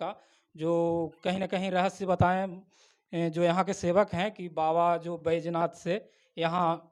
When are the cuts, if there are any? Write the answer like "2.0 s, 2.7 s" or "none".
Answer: none